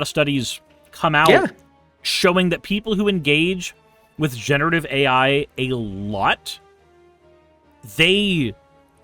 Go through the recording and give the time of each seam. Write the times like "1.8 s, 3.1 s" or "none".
none